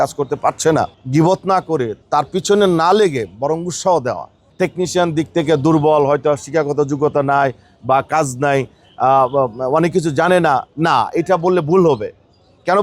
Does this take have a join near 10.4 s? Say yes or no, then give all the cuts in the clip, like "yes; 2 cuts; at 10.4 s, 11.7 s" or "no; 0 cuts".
no; 3 cuts; at 1.0 s, 2.0 s, 4.4 s